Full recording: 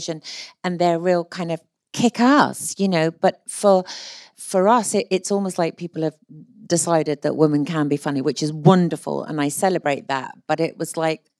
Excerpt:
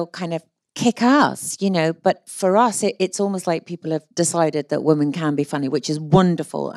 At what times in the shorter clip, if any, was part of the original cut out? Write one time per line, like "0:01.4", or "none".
0:02.3
0:04.1